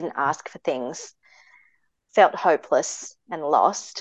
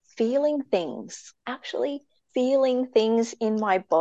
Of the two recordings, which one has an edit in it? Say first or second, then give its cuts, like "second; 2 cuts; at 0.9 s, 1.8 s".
second; 2 cuts; at 1.3 s, 2.1 s